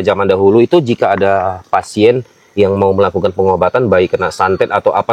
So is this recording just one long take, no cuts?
yes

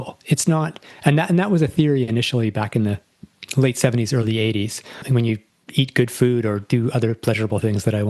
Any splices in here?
yes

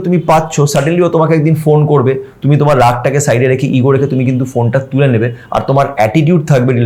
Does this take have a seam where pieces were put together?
no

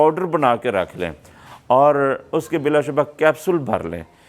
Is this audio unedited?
yes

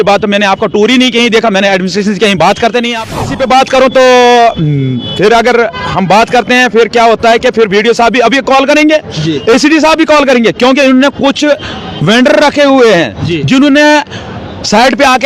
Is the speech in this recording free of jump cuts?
no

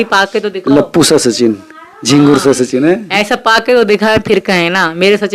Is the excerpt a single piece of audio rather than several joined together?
yes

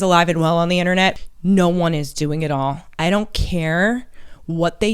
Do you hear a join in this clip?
yes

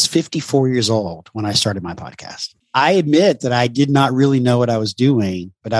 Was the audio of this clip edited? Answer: yes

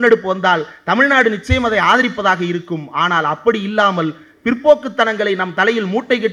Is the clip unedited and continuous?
yes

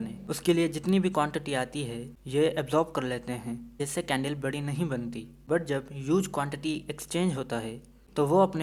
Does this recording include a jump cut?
no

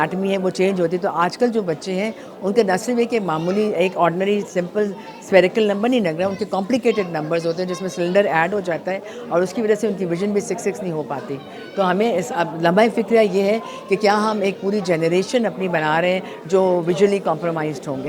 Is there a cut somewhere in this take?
no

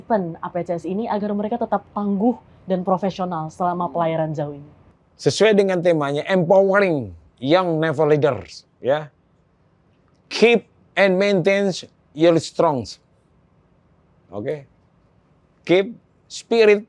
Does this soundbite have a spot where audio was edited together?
no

